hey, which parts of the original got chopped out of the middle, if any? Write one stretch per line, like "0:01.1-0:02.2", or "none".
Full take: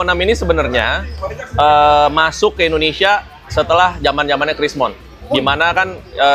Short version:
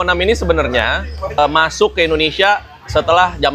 0:01.4-0:02.0